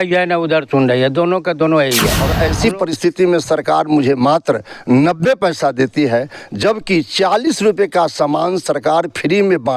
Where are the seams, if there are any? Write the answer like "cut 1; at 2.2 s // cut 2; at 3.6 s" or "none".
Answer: cut 1; at 2.2 s